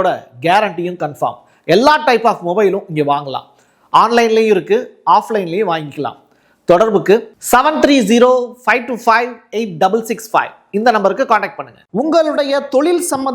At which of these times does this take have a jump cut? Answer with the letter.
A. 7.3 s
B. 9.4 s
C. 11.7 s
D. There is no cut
C